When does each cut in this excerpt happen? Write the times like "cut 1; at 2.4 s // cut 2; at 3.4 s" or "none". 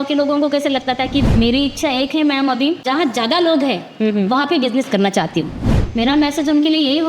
cut 1; at 1.2 s // cut 2; at 2.8 s // cut 3; at 5.6 s